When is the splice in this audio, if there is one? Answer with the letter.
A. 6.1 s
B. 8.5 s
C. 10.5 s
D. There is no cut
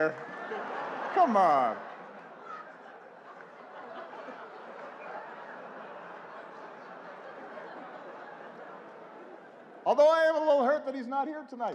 D